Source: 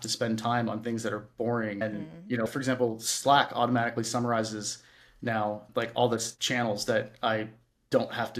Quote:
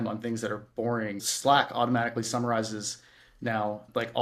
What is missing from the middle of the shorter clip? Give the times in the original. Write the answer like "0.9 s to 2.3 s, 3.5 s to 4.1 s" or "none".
1.8 s to 3.0 s